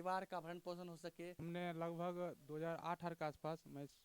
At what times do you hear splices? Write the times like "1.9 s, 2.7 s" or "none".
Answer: 1.4 s